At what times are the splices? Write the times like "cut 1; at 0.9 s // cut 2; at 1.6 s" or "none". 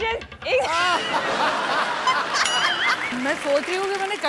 cut 1; at 3.1 s